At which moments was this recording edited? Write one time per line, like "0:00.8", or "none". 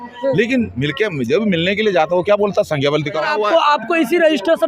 0:03.3